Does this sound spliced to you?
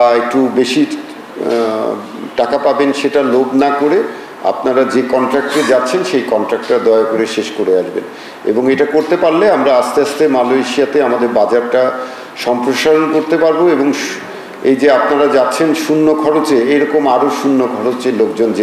no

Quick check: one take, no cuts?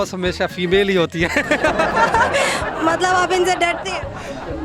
yes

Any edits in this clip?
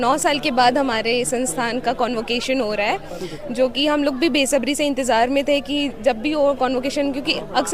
no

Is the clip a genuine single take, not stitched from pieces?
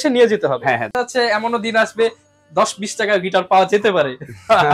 no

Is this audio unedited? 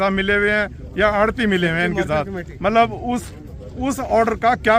yes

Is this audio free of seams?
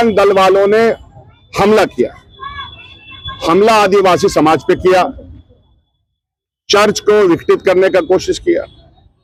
yes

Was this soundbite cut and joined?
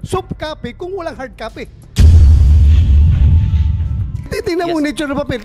yes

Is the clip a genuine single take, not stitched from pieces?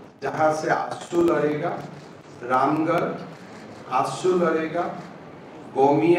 yes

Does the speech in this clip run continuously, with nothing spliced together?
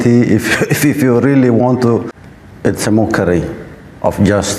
no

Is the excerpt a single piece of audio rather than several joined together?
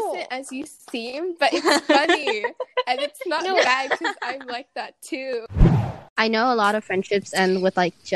no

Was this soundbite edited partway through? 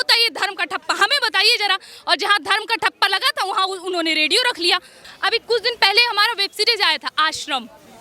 yes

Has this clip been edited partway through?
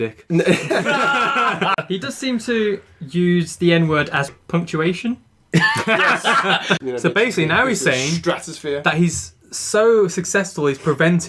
yes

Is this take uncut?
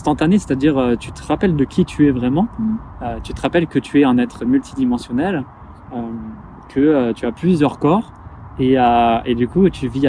yes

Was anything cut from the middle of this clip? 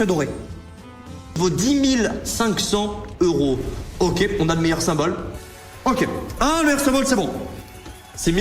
yes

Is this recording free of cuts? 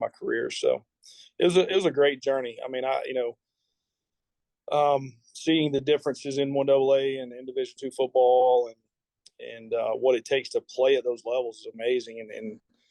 yes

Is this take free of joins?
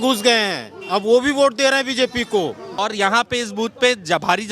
no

